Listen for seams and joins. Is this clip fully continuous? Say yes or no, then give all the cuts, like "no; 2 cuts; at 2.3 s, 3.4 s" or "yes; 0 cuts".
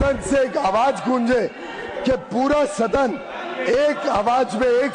yes; 0 cuts